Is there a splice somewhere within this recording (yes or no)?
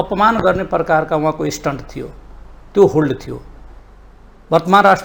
no